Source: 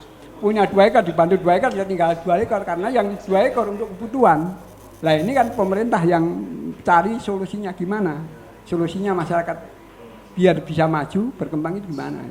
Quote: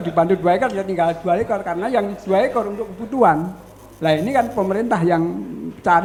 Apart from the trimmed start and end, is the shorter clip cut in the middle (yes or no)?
no